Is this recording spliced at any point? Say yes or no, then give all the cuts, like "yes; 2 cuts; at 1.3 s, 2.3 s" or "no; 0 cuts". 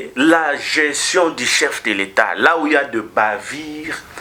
no; 0 cuts